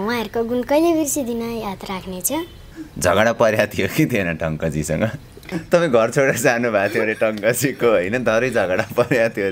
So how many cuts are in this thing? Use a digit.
2